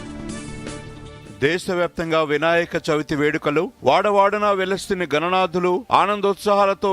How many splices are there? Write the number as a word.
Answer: one